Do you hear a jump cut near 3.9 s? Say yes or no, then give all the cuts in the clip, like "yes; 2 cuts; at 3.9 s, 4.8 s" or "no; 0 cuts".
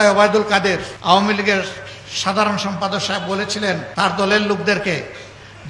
yes; 2 cuts; at 0.9 s, 3.9 s